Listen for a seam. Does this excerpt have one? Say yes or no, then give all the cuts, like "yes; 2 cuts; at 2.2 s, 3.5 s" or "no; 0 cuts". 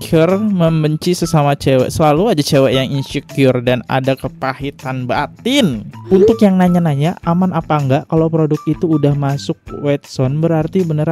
no; 0 cuts